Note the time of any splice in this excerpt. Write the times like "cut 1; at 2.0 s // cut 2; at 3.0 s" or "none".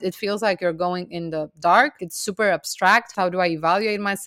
cut 1; at 2.1 s // cut 2; at 3.1 s